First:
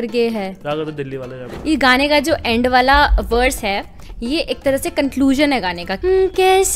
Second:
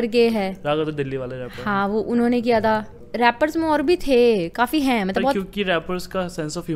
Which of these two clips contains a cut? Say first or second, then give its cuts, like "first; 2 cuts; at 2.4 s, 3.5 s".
first; 2 cuts; at 1.4 s, 5.8 s